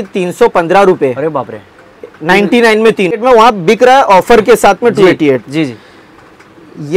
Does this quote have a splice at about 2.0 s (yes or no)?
no